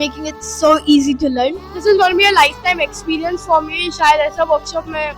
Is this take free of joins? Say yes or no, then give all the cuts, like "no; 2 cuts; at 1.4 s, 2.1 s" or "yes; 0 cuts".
no; 1 cut; at 1.7 s